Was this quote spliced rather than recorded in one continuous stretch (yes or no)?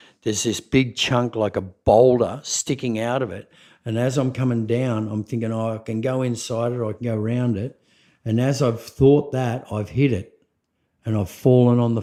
no